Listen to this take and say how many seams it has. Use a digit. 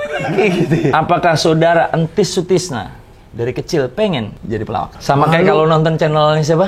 2